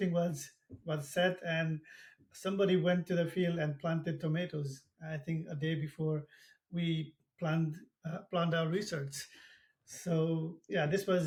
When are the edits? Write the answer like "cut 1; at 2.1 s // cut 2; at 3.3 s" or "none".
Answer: none